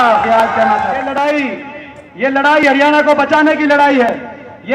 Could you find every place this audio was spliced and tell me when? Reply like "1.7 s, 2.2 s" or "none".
1.1 s